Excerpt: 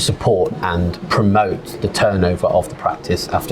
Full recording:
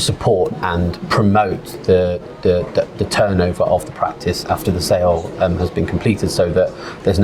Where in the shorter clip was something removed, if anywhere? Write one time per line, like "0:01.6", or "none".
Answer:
0:01.8